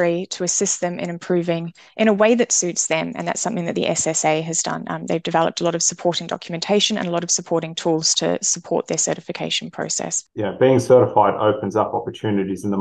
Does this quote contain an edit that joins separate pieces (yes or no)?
yes